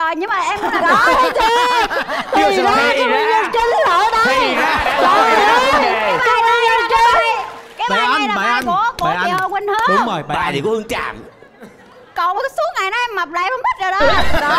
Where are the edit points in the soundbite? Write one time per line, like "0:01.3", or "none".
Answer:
none